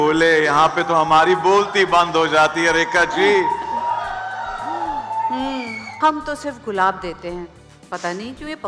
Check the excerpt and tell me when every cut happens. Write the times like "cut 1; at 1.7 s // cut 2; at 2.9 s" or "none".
cut 1; at 5.8 s